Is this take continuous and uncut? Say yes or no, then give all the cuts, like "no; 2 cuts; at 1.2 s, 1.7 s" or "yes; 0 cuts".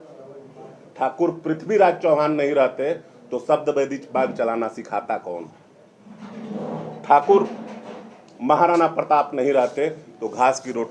yes; 0 cuts